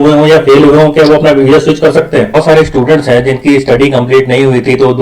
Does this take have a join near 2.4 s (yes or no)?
yes